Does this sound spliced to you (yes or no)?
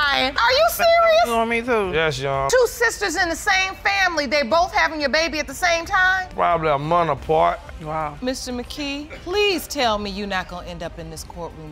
no